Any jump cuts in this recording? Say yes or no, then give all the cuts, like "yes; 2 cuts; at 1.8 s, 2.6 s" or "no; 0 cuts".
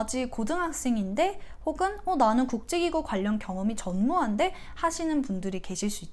no; 0 cuts